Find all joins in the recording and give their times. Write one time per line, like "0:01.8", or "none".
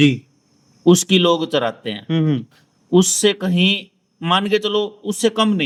none